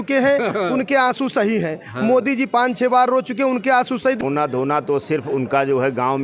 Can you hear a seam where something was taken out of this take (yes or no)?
yes